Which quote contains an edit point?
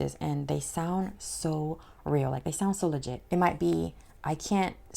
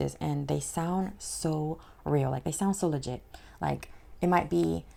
first; 1 cut; at 3.1 s

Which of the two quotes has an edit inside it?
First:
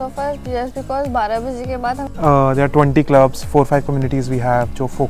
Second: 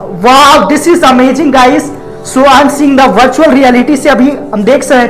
first; 1 cut; at 2.1 s

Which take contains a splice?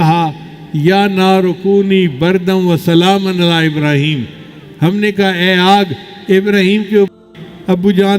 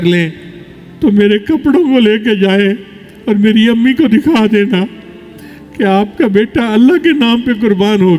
first; 1 cut; at 7.1 s

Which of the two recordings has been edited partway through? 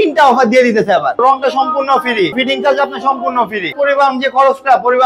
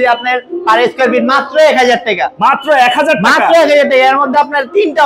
first; 3 cuts; at 1.2 s, 2.4 s, 3.7 s

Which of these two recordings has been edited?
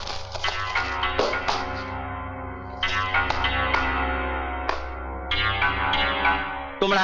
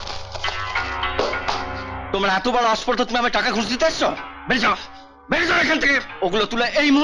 second; 2 cuts; at 2.0 s, 6.1 s

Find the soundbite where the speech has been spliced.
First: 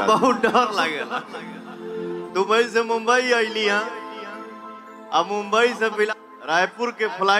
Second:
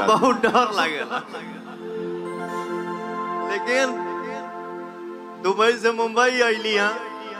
first; 2 cuts; at 2.2 s, 6.1 s

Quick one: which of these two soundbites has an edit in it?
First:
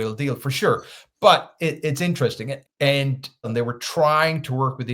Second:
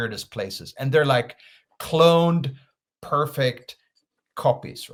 first; 1 cut; at 3.5 s

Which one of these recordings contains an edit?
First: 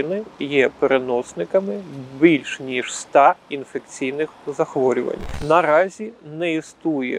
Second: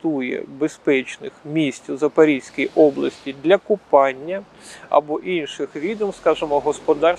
first; 1 cut; at 5.2 s

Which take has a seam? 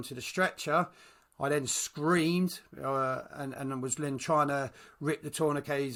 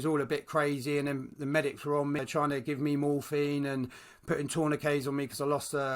second; 1 cut; at 2.2 s

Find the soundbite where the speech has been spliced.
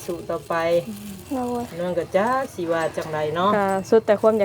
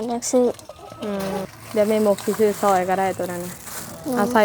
second; 1 cut; at 1.5 s

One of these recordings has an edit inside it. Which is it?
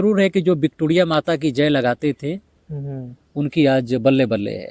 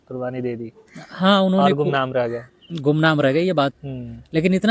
second; 1 cut; at 3.8 s

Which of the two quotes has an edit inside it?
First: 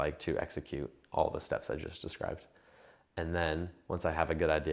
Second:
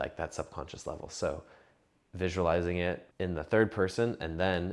second; 1 cut; at 3.1 s

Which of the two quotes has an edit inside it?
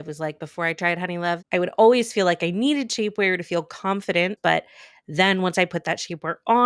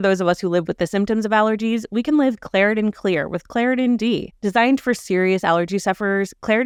first; 2 cuts; at 1.4 s, 4.4 s

